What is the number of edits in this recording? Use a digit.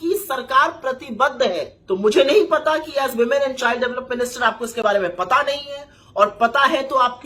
1